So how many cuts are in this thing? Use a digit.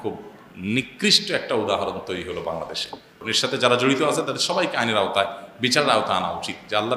1